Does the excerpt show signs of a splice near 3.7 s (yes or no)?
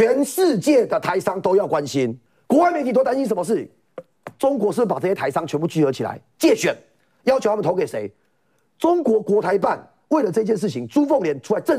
no